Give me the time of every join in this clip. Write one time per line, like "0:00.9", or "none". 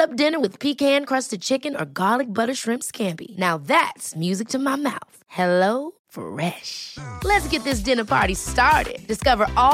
none